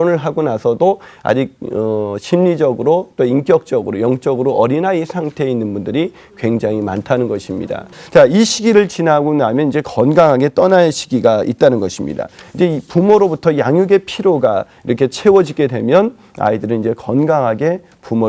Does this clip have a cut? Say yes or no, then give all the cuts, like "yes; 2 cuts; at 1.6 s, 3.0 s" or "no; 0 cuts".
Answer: yes; 1 cut; at 7.9 s